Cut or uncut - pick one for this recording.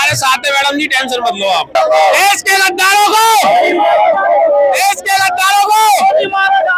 cut